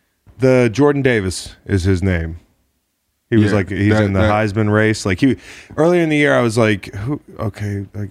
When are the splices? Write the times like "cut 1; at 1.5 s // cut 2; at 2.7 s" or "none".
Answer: none